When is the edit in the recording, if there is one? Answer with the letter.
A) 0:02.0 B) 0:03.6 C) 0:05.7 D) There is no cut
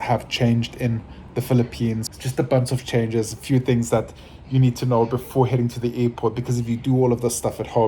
A